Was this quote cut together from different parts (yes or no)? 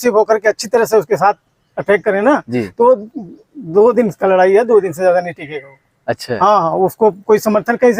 no